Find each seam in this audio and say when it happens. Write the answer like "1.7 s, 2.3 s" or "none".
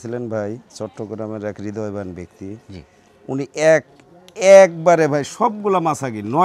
none